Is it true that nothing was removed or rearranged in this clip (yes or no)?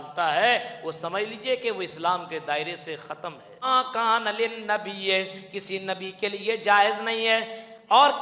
no